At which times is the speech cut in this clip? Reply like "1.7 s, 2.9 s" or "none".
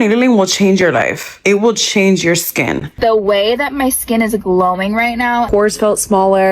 1.2 s, 2.9 s, 5.5 s

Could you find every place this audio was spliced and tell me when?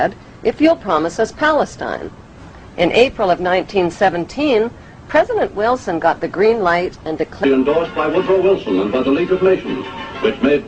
none

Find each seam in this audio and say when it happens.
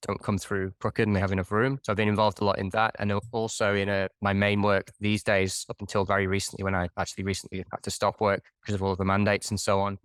none

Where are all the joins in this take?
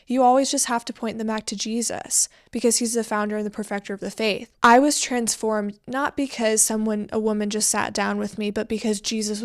4.5 s

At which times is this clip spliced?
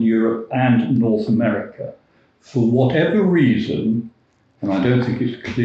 none

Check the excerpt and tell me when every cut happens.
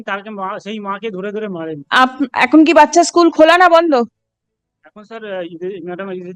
none

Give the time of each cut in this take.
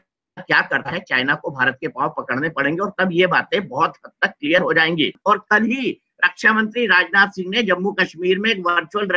none

